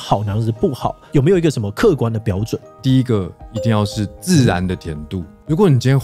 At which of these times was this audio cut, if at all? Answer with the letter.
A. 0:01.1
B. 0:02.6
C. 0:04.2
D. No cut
B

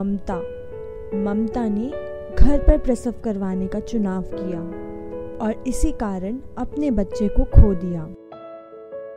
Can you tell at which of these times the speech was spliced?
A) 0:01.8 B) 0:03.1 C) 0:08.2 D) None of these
C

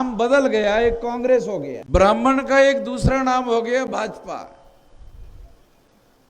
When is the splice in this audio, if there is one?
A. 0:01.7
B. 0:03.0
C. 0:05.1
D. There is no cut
A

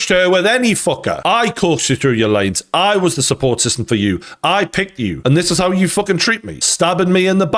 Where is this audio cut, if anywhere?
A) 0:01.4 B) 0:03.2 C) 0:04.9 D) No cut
D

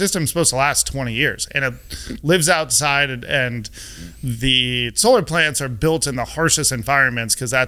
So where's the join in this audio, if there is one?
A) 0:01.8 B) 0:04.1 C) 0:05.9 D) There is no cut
D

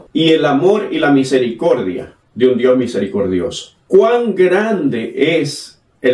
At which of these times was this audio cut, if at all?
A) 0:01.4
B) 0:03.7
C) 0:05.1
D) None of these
B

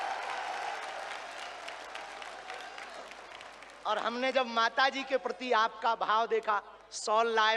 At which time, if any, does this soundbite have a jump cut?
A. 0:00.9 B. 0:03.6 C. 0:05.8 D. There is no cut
D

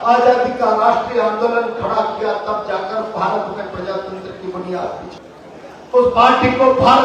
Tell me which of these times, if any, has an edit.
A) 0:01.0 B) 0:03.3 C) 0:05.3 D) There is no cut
C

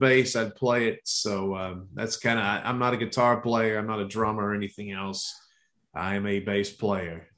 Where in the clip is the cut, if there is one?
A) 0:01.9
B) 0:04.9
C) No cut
C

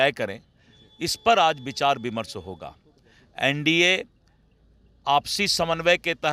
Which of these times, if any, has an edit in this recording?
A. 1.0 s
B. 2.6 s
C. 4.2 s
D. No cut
D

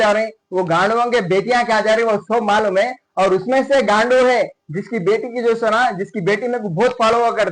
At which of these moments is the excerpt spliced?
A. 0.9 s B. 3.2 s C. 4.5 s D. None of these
D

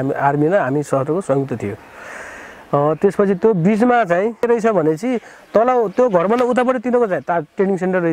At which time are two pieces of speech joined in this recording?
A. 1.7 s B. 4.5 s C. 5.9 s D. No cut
B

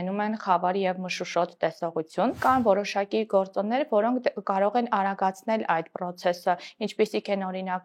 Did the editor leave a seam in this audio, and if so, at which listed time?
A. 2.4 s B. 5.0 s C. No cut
A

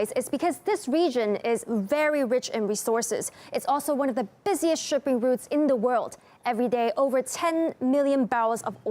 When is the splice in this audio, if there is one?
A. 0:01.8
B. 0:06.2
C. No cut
A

